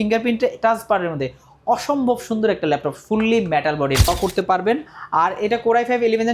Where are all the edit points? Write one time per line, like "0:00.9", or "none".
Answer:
0:04.1